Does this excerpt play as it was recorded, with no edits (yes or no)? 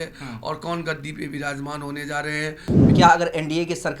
no